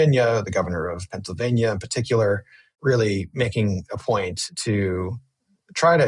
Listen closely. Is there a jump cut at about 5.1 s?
no; 1 cut; at 2.7 s

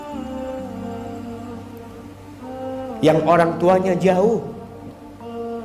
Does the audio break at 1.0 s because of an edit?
no; 0 cuts

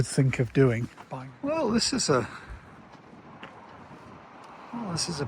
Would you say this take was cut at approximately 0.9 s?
yes; 1 cut; at 0.9 s

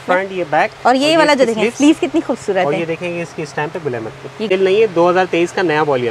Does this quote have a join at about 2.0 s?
no; 1 cut; at 4.5 s

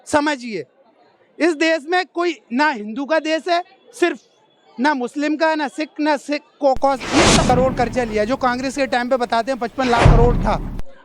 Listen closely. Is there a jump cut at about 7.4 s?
yes; 1 cut; at 7.4 s

